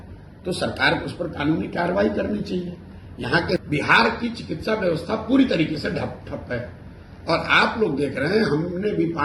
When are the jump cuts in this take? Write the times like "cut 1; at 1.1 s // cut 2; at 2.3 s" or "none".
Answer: cut 1; at 3.6 s